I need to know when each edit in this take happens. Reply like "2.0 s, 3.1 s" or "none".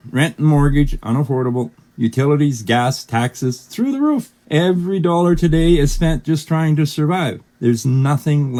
none